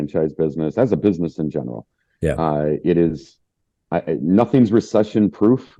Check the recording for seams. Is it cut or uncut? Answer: uncut